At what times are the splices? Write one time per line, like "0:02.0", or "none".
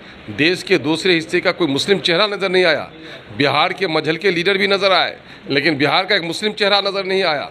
none